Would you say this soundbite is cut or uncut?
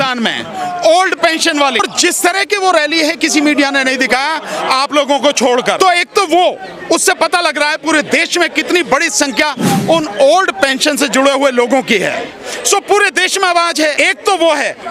cut